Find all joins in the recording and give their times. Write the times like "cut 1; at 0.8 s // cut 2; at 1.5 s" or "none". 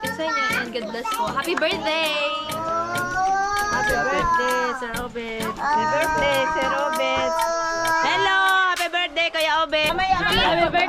cut 1; at 9.9 s